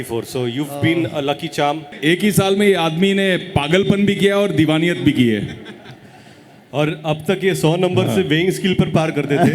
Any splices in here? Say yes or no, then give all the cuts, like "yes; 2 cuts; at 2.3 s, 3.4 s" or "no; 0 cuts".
yes; 1 cut; at 1.9 s